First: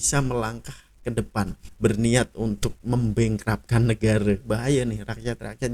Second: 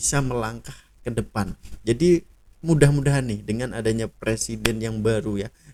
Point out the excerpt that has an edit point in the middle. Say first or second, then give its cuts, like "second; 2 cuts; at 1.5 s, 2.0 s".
first; 2 cuts; at 1.6 s, 4.4 s